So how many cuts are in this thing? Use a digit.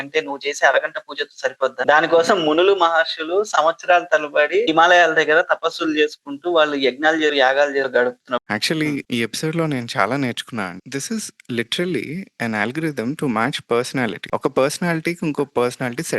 2